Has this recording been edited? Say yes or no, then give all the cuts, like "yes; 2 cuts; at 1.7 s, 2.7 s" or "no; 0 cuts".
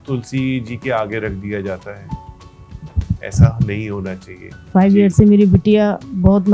yes; 1 cut; at 4.7 s